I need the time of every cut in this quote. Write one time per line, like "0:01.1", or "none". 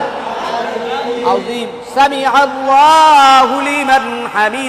none